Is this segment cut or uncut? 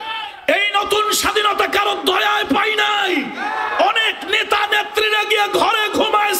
uncut